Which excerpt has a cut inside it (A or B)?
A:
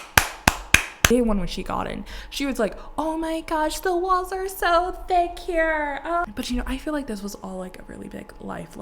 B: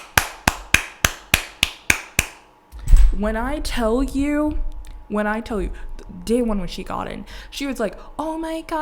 A